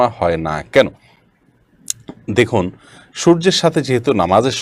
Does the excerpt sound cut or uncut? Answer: uncut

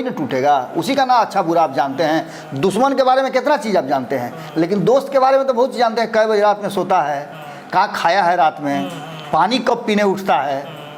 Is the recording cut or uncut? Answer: uncut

